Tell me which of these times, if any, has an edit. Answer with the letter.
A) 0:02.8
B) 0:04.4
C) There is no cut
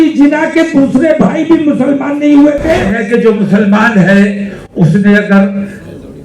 A